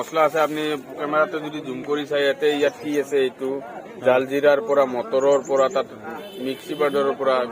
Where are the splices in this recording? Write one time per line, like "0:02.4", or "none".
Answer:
none